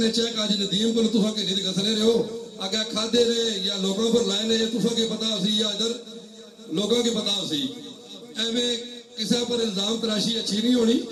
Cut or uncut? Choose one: uncut